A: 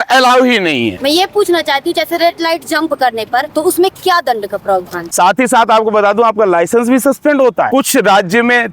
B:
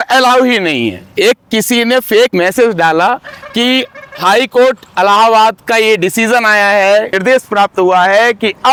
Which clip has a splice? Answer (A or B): A